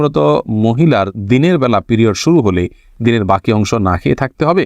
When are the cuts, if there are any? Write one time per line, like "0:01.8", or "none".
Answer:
none